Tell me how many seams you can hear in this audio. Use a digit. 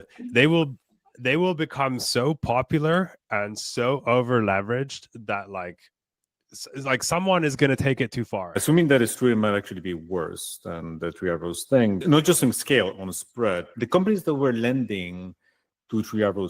3